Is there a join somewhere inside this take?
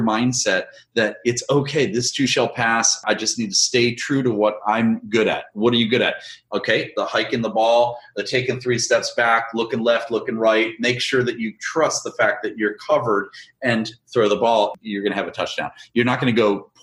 no; 0 cuts

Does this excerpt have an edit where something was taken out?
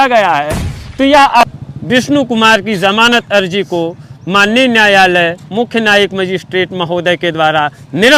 yes; 1 cut; at 1.4 s

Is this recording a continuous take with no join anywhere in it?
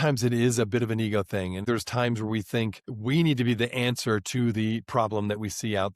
no; 1 cut; at 1.6 s

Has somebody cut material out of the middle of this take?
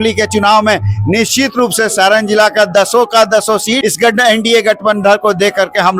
yes; 1 cut; at 3.8 s

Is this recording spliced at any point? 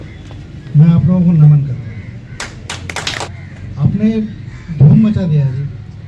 yes; 1 cut; at 3.3 s

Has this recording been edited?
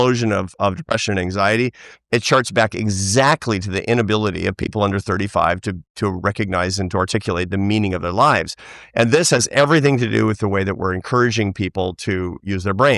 no; 0 cuts

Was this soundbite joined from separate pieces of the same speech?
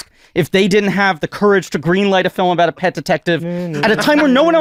no; 0 cuts

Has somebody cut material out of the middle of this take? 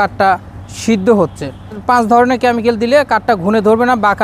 yes; 1 cut; at 1.8 s

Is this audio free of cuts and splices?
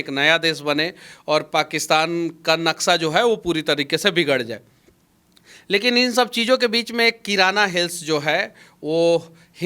yes; 0 cuts

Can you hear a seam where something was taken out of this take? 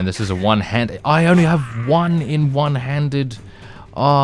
no; 0 cuts

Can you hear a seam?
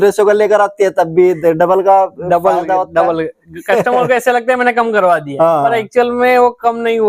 no; 0 cuts

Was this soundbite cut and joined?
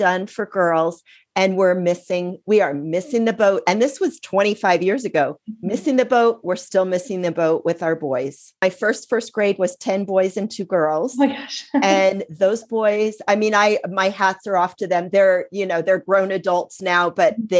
yes; 1 cut; at 8.6 s

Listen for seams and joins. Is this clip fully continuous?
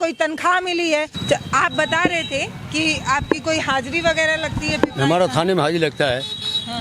yes; 0 cuts

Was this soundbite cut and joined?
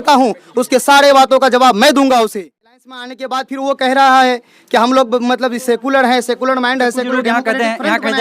yes; 1 cut; at 2.8 s

